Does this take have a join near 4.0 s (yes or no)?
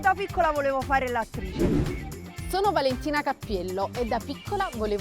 no